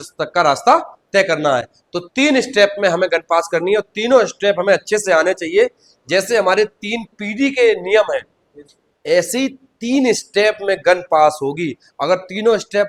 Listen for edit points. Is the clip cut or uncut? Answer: uncut